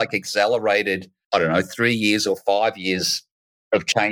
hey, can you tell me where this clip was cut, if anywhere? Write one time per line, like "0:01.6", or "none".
0:01.1